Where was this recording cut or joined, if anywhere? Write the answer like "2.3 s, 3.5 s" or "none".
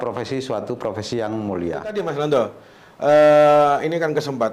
1.9 s

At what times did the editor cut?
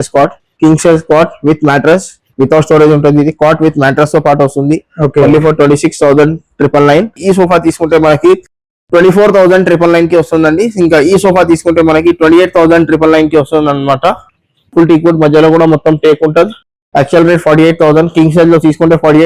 7.2 s, 14.7 s

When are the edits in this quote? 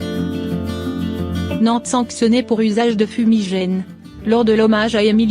1.6 s

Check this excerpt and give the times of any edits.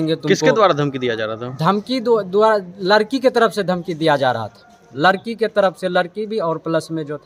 none

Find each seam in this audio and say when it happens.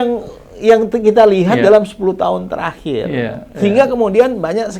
none

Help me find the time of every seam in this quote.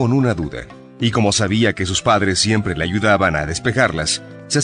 none

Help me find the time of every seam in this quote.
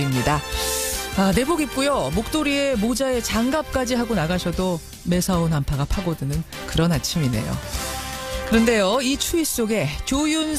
none

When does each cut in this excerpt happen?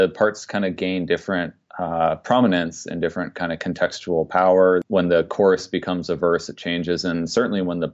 4.8 s

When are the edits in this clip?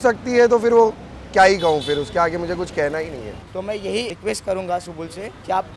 3.3 s

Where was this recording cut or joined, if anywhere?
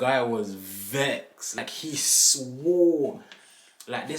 1.6 s

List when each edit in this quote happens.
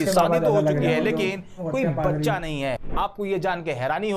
2.8 s

